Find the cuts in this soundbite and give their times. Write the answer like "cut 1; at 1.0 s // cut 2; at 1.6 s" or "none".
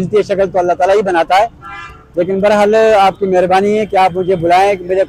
none